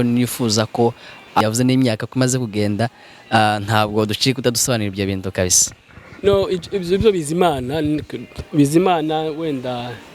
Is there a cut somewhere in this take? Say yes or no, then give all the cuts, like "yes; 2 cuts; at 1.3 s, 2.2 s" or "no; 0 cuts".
yes; 1 cut; at 1.4 s